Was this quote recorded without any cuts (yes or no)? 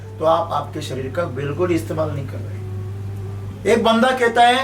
yes